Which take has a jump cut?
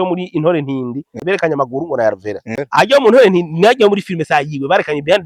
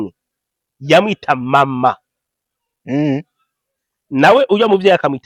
first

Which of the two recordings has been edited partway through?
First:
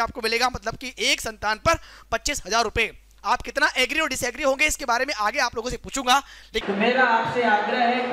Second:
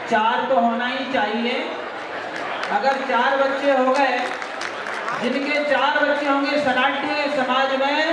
first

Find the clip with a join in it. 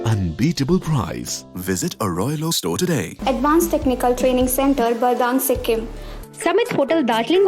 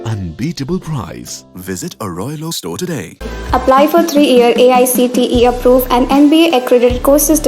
first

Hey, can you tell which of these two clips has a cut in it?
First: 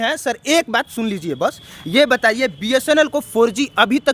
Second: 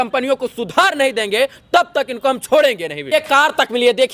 second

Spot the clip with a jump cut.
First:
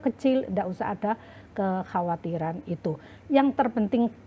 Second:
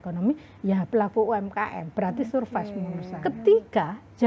second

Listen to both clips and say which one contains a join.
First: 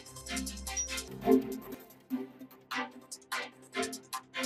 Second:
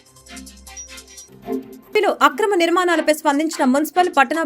second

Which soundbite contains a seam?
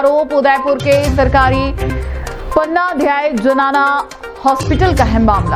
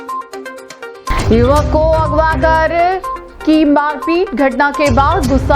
second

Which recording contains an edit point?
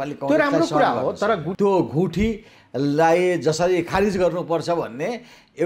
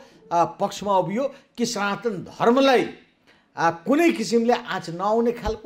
first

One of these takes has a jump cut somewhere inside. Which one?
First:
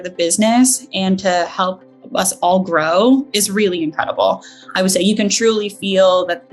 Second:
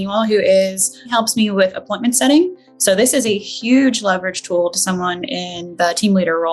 second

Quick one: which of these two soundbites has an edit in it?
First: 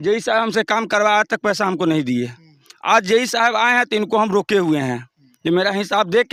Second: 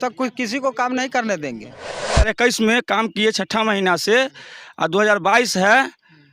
second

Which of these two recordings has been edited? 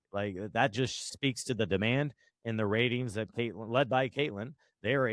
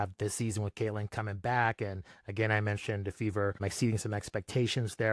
second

